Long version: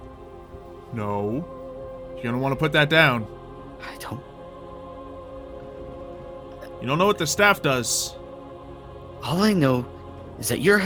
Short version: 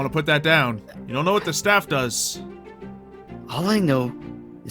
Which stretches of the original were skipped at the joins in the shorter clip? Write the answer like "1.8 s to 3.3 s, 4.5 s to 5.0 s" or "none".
3.4 s to 6.7 s